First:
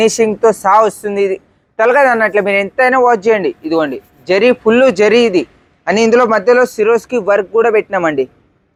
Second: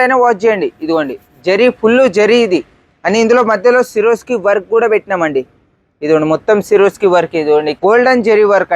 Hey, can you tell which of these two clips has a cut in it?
second; 1 cut; at 7.7 s

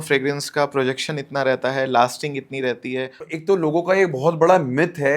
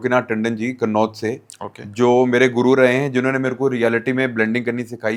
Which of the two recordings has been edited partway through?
first; 1 cut; at 3.3 s

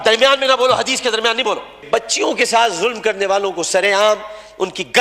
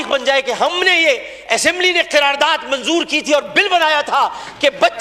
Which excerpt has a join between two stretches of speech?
first; 1 cut; at 1.8 s

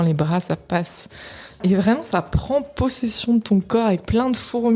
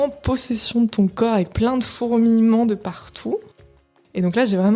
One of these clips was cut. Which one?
first; 1 cut; at 1.6 s

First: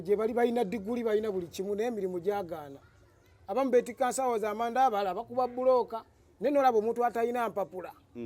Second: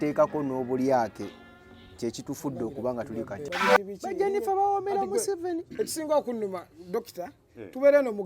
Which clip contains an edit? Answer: second; 1 cut; at 3.5 s

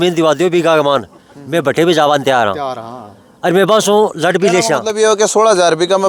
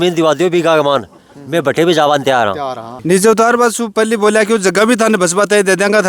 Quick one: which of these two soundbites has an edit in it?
second; 1 cut; at 2.9 s

